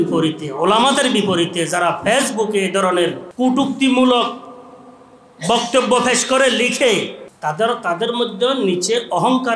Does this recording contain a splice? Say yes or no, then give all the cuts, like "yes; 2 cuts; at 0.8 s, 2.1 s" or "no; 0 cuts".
yes; 2 cuts; at 3.2 s, 7.2 s